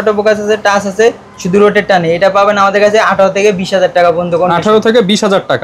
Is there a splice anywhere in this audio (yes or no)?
no